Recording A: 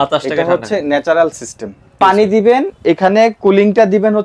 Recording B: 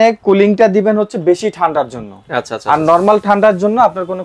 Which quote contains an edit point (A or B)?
A